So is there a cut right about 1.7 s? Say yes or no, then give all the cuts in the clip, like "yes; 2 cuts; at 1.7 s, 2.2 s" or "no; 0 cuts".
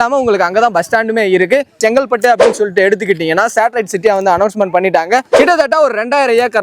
yes; 2 cuts; at 1.7 s, 5.3 s